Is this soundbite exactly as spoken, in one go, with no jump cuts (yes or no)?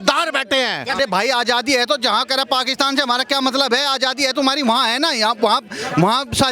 no